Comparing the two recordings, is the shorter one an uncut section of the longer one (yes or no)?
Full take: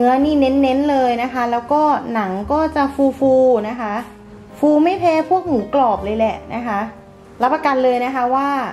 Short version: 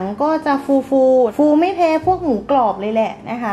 no